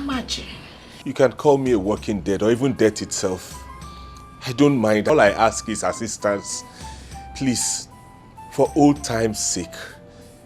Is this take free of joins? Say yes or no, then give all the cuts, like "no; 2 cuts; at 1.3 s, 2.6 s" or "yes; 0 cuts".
no; 1 cut; at 5.1 s